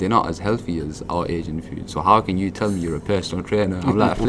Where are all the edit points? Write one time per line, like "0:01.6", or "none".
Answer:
none